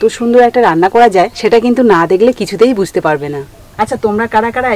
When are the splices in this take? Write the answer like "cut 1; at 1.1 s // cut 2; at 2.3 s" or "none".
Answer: cut 1; at 1.4 s